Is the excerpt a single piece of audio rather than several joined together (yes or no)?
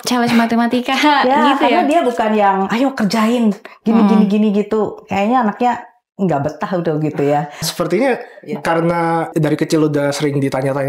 no